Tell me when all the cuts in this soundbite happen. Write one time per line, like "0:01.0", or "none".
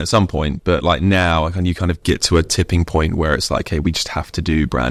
none